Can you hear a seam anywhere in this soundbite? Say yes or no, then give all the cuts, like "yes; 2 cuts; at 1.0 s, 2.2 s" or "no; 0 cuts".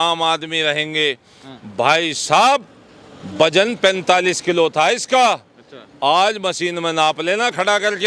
no; 0 cuts